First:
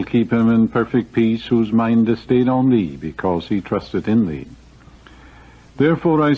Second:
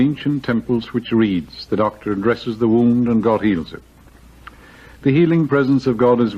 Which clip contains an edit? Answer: first; 1 cut; at 4.5 s

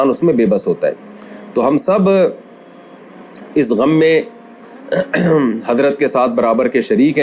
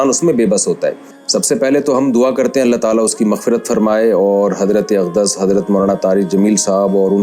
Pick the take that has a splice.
second; 1 cut; at 1.1 s

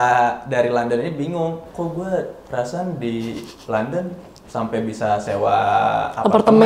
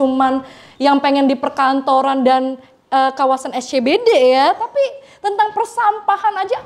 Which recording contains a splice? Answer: first; 1 cut; at 1.6 s

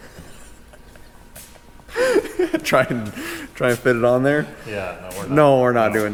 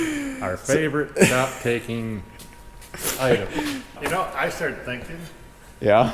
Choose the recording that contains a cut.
second; 1 cut; at 4.0 s

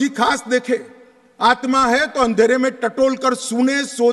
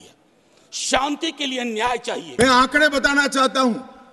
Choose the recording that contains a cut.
second; 1 cut; at 2.3 s

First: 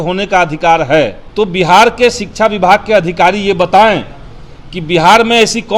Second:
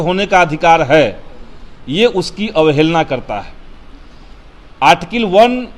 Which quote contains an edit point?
first; 1 cut; at 1.2 s

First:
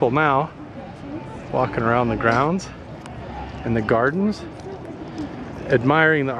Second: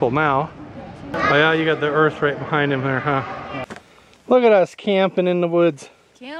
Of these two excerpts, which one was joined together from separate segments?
second; 2 cuts; at 1.1 s, 3.7 s

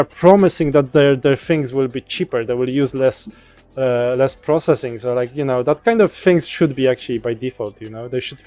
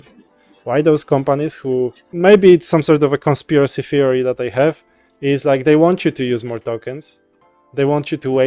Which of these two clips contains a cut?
second; 1 cut; at 2.1 s

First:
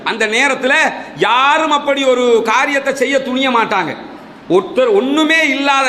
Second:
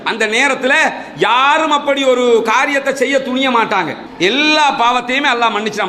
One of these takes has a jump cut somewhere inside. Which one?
second; 1 cut; at 4.0 s

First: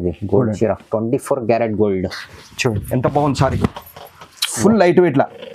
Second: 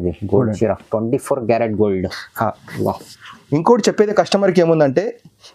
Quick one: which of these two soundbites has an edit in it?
first; 1 cut; at 2.2 s

